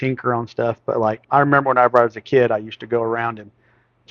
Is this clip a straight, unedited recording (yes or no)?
no